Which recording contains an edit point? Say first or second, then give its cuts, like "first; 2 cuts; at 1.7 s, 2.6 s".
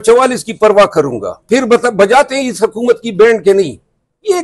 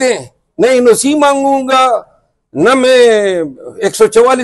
first; 1 cut; at 1.3 s